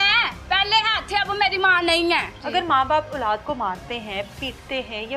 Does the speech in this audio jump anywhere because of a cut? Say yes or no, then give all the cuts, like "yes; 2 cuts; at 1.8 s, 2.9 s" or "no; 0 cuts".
yes; 1 cut; at 2.4 s